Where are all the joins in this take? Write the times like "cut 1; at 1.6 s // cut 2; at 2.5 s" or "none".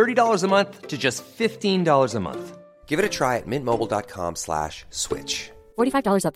none